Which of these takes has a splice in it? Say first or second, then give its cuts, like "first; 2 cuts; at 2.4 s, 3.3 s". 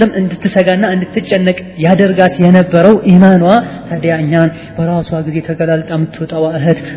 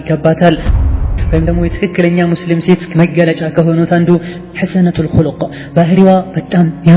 second; 1 cut; at 1.1 s